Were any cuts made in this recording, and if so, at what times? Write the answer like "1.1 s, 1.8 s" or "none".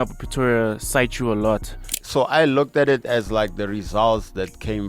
2.0 s